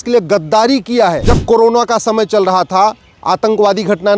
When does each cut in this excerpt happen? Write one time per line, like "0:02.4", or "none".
0:01.2